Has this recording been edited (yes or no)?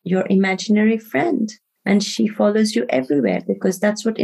no